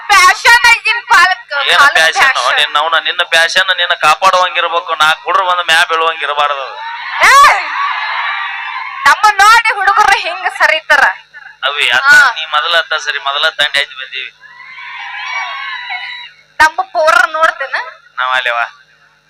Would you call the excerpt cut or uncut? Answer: uncut